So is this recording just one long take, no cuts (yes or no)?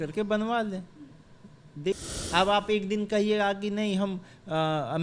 no